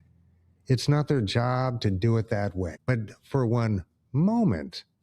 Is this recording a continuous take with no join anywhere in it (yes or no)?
no